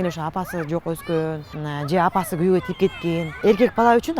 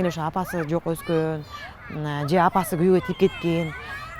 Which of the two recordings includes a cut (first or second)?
first